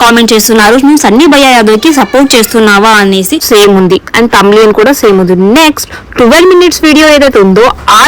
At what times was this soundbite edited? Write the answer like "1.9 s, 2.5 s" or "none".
3.4 s